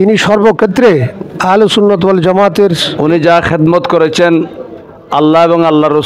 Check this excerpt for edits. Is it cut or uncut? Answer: cut